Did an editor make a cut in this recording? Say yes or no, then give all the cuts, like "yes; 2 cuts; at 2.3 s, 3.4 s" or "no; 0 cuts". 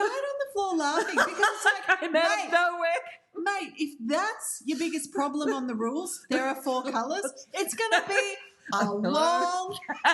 no; 0 cuts